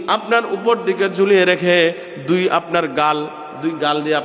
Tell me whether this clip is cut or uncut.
uncut